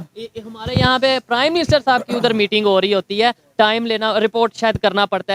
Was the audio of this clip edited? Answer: no; 0 cuts

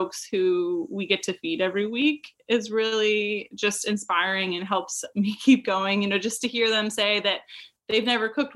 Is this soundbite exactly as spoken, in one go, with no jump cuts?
yes; 0 cuts

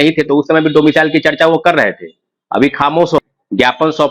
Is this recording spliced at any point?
yes; 1 cut; at 3.2 s

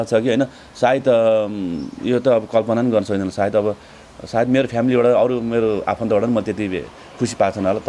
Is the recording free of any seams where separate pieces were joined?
yes; 0 cuts

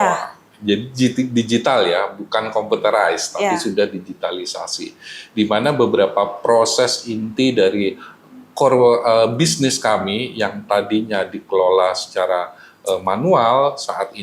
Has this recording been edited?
no; 0 cuts

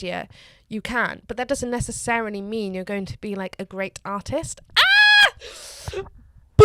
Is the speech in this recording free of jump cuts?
yes; 0 cuts

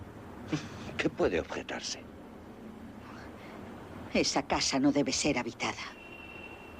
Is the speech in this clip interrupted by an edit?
no; 0 cuts

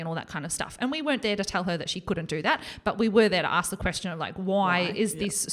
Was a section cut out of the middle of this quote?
no; 0 cuts

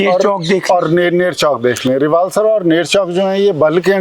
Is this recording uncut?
yes; 0 cuts

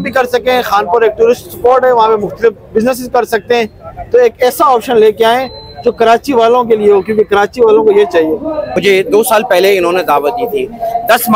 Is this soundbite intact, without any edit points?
no; 1 cut; at 8.7 s

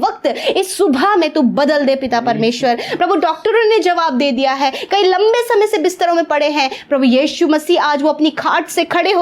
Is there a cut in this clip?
no; 0 cuts

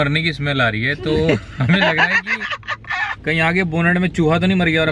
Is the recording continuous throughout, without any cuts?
yes; 0 cuts

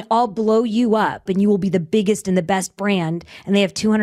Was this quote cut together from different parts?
yes; 1 cut; at 1.3 s

